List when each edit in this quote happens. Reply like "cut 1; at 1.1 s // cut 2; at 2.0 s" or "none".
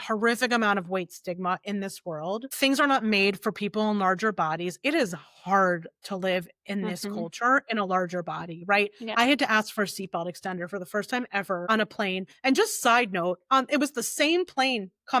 cut 1; at 2.5 s // cut 2; at 11.6 s